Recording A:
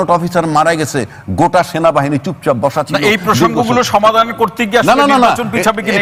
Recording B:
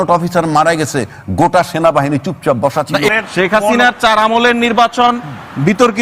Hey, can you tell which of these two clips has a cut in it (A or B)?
B